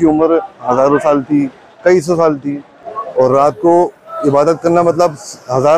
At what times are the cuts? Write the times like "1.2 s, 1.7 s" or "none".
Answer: 2.8 s